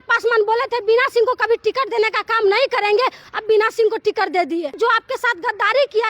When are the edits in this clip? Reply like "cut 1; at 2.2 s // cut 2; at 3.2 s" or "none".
cut 1; at 3.3 s // cut 2; at 4.7 s